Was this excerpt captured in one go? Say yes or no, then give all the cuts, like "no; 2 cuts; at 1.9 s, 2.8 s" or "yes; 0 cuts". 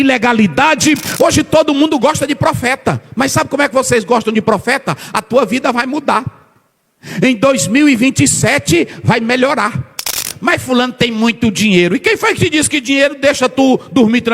no; 2 cuts; at 1.1 s, 10.3 s